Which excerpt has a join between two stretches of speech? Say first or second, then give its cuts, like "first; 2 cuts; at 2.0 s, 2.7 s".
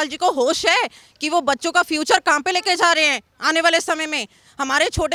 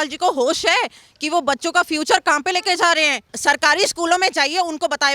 second; 1 cut; at 3.3 s